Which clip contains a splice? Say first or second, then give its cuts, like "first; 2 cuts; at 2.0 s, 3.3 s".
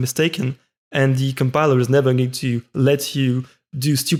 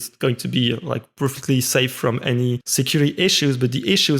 second; 1 cut; at 2.6 s